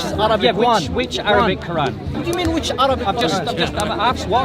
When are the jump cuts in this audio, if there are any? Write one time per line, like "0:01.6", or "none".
0:02.1